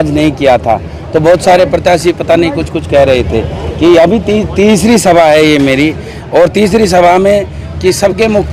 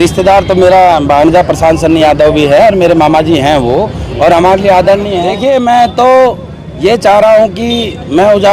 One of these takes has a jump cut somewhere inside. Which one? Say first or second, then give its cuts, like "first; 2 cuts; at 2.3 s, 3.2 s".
second; 1 cut; at 5.3 s